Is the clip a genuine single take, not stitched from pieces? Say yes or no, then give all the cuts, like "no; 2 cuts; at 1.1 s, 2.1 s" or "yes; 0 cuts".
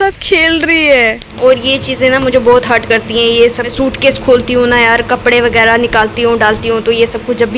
no; 2 cuts; at 1.2 s, 3.7 s